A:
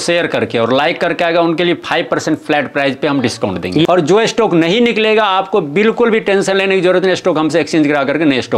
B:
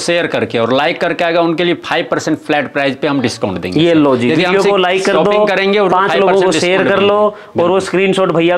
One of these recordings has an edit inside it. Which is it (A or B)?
A